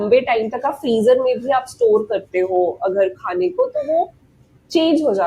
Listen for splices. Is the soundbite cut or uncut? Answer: uncut